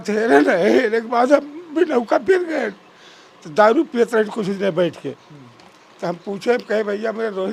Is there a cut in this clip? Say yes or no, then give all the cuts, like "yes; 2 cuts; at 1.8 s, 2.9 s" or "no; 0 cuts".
no; 0 cuts